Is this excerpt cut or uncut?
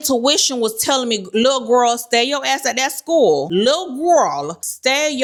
uncut